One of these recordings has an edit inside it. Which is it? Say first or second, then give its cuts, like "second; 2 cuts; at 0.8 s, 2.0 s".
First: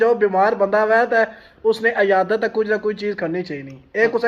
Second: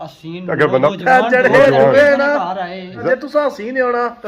second; 2 cuts; at 1.0 s, 3.0 s